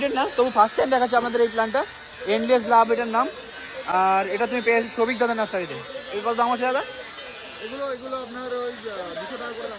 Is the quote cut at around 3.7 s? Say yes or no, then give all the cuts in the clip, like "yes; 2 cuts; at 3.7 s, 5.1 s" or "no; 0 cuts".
no; 0 cuts